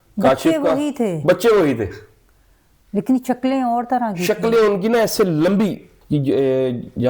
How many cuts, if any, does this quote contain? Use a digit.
1